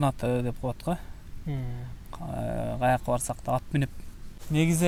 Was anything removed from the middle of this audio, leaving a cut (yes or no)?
no